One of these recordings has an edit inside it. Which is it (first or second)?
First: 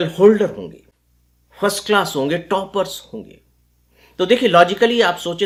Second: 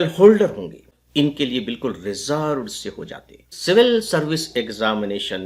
second